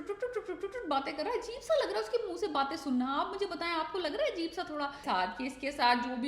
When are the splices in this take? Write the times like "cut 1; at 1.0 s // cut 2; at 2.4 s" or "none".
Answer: cut 1; at 5.0 s